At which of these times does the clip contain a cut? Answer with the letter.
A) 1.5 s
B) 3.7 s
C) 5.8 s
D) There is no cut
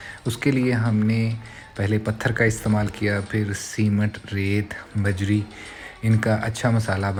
D